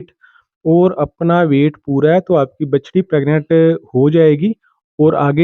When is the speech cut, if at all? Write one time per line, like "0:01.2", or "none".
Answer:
none